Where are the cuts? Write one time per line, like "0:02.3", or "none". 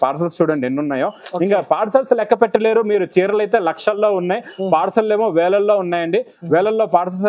none